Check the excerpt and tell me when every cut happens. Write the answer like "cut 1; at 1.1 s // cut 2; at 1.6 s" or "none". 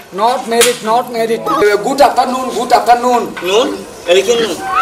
cut 1; at 1.6 s

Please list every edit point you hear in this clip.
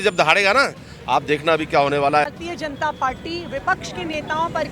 cut 1; at 2.4 s

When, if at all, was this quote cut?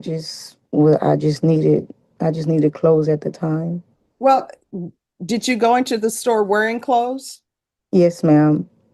none

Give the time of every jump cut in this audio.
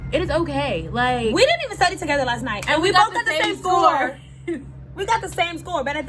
none

